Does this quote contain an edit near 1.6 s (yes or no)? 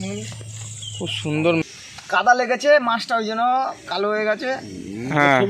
yes